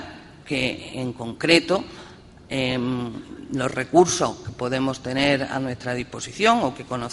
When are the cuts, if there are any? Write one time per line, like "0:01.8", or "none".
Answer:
none